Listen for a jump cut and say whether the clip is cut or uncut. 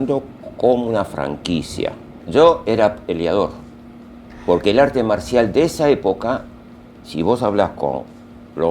cut